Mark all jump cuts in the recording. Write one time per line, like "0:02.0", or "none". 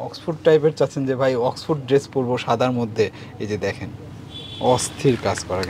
none